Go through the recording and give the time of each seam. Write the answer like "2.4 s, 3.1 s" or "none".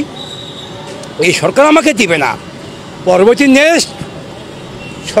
none